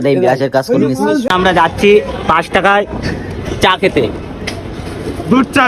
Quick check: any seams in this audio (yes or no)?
yes